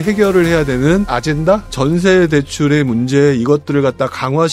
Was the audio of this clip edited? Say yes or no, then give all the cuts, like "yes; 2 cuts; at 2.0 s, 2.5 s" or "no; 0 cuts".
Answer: yes; 1 cut; at 1.6 s